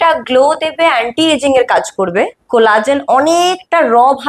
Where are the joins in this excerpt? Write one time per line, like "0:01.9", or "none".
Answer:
0:02.4